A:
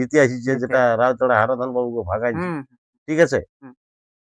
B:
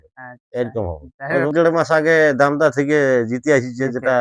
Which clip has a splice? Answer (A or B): B